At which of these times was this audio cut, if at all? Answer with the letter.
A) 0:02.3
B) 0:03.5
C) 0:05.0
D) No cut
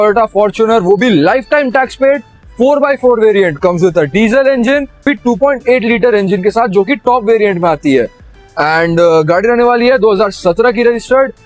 D